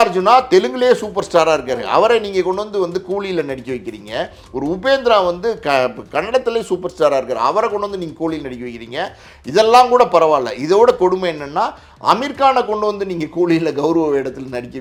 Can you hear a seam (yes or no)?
no